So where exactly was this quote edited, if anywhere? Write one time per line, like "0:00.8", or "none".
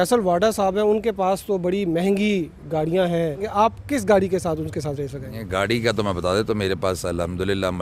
0:03.5